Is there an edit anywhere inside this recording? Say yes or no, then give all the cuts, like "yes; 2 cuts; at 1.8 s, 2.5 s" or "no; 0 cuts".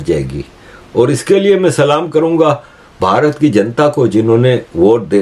no; 0 cuts